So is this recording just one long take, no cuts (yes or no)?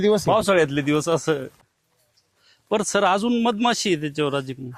yes